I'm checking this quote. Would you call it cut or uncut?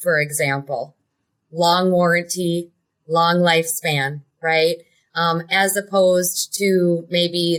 uncut